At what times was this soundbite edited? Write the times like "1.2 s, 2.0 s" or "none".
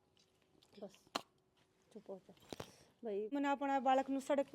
3.3 s